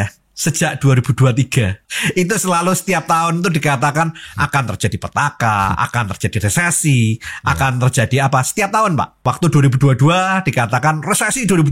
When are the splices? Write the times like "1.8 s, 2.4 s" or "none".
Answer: 1.9 s, 9.2 s